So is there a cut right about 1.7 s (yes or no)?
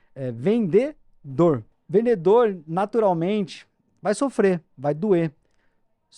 yes